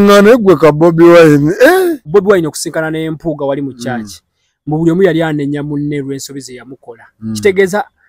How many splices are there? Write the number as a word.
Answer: one